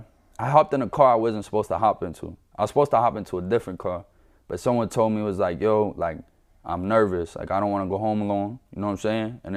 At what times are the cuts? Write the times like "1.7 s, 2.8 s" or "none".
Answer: none